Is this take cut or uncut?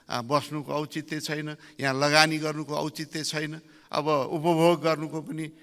uncut